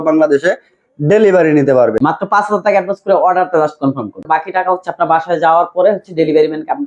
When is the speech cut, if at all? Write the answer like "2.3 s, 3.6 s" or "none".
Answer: 2.0 s, 4.2 s